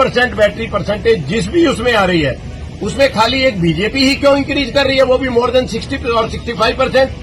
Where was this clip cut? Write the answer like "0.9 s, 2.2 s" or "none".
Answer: none